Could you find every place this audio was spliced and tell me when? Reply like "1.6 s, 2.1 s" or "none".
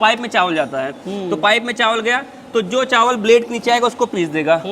none